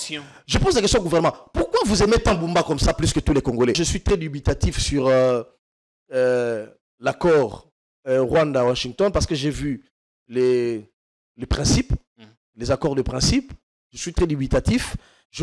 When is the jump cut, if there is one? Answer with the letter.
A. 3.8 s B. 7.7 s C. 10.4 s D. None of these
A